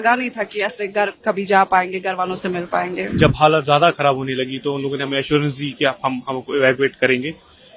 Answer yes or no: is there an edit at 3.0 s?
yes